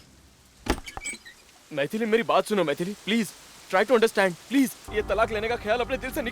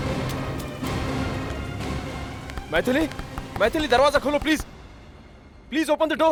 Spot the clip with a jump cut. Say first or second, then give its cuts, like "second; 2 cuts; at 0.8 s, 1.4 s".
first; 1 cut; at 4.8 s